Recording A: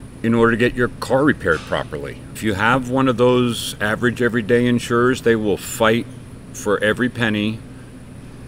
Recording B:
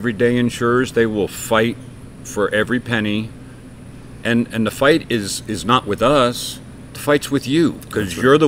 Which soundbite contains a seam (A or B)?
A